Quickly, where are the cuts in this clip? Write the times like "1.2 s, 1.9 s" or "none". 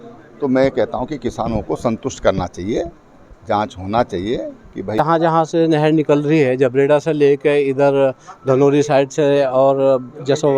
5.0 s

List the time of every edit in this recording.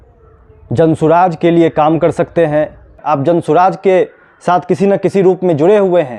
2.9 s

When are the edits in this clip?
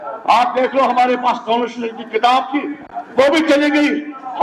none

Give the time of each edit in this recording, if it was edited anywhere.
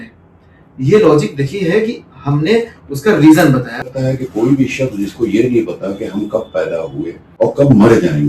3.9 s, 7.3 s

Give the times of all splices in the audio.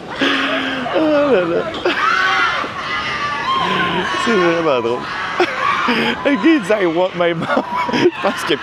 none

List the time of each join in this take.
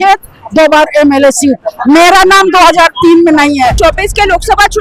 3.8 s

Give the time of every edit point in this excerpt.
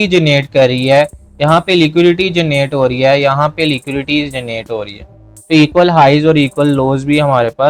5.3 s

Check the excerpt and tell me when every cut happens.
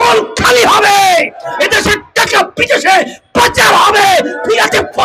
none

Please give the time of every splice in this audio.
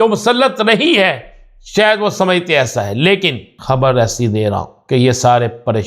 3.5 s, 4.7 s

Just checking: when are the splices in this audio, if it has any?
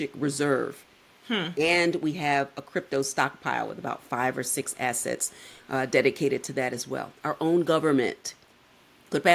none

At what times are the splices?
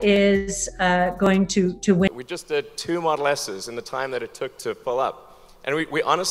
2.1 s

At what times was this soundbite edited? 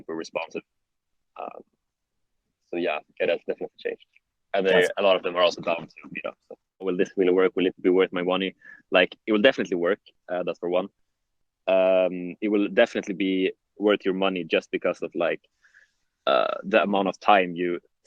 6.9 s

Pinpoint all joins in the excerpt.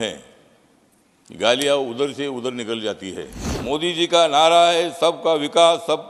3.5 s

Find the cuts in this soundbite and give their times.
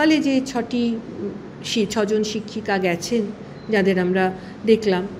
none

